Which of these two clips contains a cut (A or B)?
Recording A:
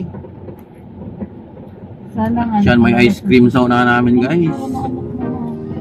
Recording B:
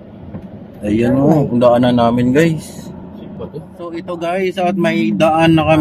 B